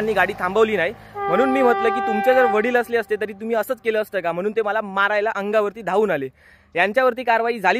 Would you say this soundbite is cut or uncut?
uncut